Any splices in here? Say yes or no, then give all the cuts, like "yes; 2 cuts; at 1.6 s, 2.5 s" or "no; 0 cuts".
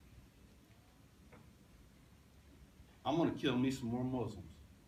no; 0 cuts